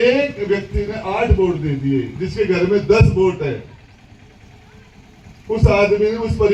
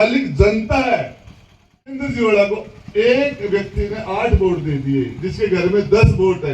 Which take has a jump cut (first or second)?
second